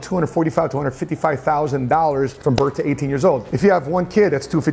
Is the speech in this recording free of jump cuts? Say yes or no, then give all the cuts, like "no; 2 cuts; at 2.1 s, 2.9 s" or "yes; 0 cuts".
yes; 0 cuts